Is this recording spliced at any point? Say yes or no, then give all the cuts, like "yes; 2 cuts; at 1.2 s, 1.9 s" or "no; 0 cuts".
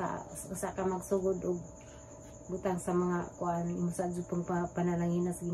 no; 0 cuts